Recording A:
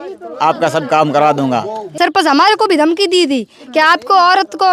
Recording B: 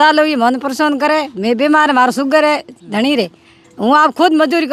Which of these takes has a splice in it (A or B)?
A